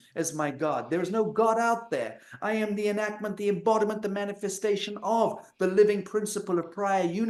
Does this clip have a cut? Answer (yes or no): no